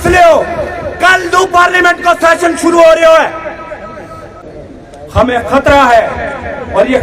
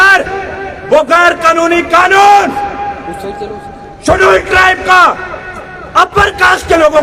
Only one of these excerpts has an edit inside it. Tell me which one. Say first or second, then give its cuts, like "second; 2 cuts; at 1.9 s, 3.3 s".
first; 1 cut; at 4.3 s